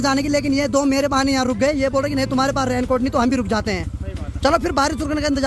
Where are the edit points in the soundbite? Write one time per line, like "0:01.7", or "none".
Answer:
none